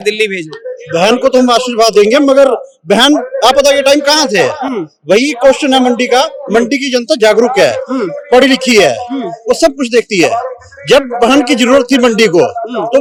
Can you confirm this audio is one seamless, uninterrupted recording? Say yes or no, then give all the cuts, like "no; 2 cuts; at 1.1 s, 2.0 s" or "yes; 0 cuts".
yes; 0 cuts